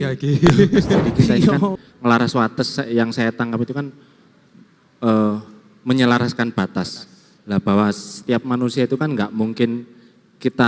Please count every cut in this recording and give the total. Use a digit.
1